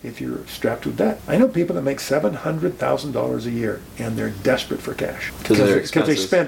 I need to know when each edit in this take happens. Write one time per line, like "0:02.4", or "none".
0:01.2
0:05.3